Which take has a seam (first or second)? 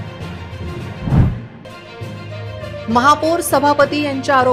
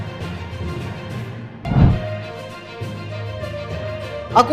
second